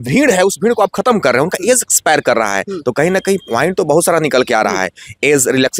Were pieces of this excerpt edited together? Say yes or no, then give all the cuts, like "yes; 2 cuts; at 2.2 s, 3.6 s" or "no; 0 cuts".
no; 0 cuts